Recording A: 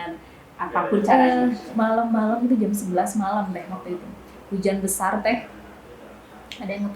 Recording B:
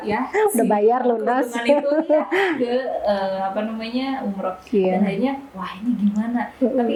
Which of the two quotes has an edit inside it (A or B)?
A